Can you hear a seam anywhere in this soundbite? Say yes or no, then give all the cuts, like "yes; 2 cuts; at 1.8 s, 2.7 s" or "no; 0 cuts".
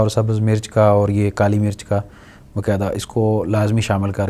no; 0 cuts